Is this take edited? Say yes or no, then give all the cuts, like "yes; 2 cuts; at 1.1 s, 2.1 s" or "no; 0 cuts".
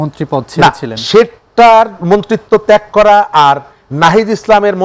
no; 0 cuts